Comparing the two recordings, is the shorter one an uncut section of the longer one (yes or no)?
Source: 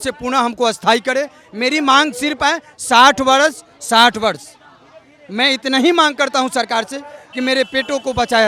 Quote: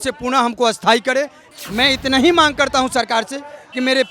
no